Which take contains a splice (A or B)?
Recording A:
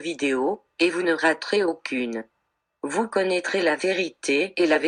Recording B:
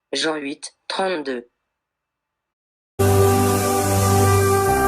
B